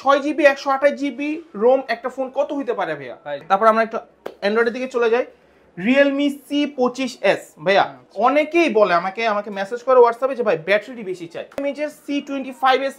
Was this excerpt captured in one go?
no; 2 cuts; at 3.4 s, 11.6 s

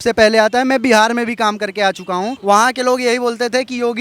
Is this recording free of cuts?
no; 1 cut; at 2.3 s

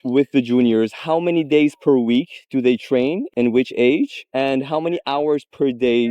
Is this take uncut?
no; 1 cut; at 3.3 s

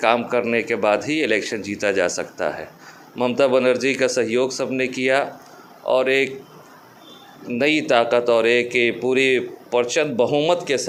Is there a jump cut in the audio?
no; 0 cuts

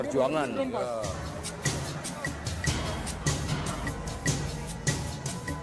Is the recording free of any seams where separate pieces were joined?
no; 1 cut; at 1.0 s

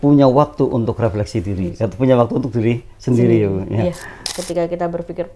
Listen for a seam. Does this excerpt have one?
yes; 1 cut; at 4.2 s

